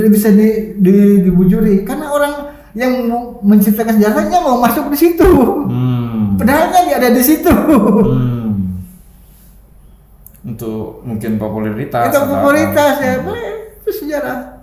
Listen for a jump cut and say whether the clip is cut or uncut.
uncut